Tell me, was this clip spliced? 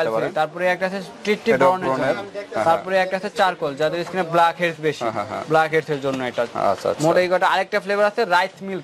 no; 0 cuts

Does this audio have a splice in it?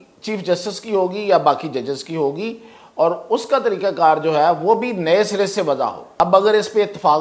yes; 1 cut; at 6.2 s

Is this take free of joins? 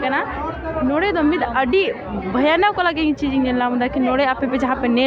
yes; 0 cuts

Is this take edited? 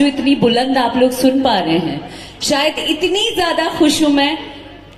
no; 0 cuts

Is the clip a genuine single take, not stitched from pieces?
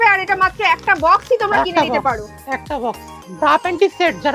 yes; 0 cuts

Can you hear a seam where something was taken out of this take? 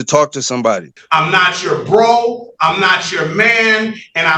yes; 1 cut; at 0.9 s

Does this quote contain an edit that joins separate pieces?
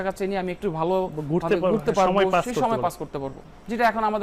no; 0 cuts

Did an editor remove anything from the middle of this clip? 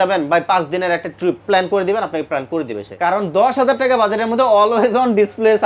yes; 2 cuts; at 1.4 s, 2.9 s

